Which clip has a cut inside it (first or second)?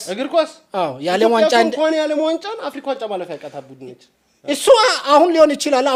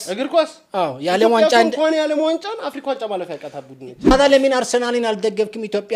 second